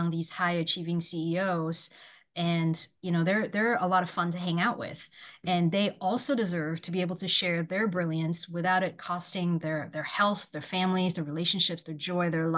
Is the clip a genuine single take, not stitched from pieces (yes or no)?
yes